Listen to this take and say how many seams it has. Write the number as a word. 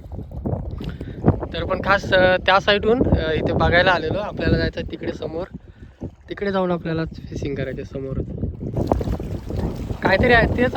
one